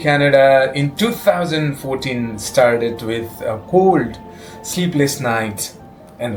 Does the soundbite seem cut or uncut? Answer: uncut